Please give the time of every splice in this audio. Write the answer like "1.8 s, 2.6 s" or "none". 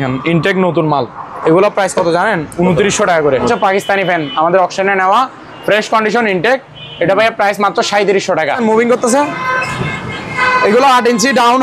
3.5 s, 8.6 s